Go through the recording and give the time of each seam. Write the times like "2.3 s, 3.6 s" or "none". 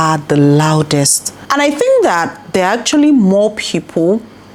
none